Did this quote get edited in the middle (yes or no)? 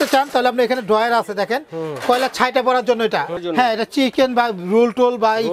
yes